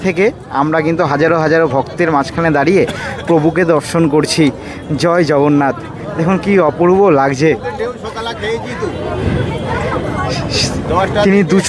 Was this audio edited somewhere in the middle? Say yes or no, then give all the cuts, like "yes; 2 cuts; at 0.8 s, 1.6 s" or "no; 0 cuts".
no; 0 cuts